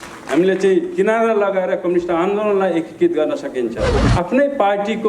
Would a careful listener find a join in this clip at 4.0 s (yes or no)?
yes